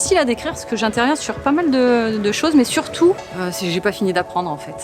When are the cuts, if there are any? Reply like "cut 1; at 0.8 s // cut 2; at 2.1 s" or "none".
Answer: cut 1; at 3.2 s